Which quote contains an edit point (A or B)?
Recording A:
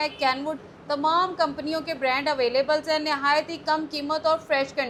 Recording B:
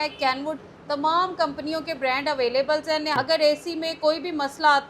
B